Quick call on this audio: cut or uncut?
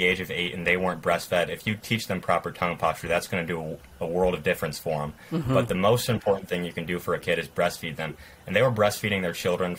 uncut